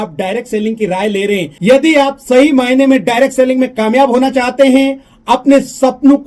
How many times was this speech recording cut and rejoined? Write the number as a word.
one